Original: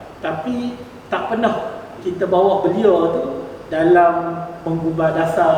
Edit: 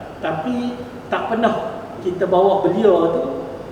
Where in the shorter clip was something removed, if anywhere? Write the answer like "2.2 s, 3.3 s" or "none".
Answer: none